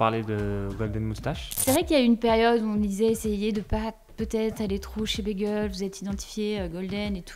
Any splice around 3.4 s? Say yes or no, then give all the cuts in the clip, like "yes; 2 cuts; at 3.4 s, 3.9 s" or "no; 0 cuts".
no; 1 cut; at 1.6 s